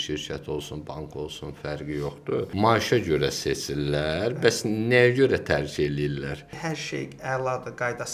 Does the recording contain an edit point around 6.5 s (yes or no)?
yes